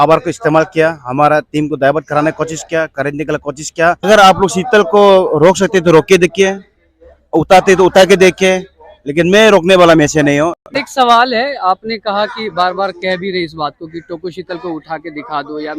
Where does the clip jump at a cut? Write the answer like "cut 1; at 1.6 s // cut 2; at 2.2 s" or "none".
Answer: cut 1; at 4.1 s // cut 2; at 10.6 s